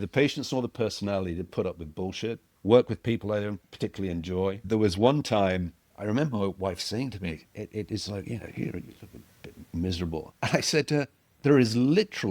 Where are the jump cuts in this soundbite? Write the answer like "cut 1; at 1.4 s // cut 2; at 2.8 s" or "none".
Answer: cut 1; at 2.5 s // cut 2; at 3.7 s // cut 3; at 4.6 s // cut 4; at 5.8 s // cut 5; at 10.3 s // cut 6; at 11.2 s